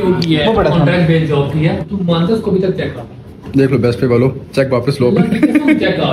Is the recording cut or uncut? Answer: cut